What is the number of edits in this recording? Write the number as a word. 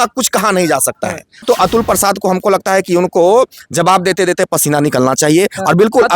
one